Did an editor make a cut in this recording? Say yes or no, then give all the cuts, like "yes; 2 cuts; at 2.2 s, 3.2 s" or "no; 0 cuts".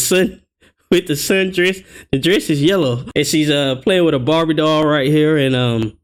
no; 0 cuts